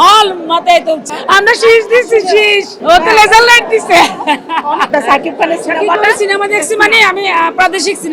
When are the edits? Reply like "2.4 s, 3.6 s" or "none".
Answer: 1.1 s, 4.9 s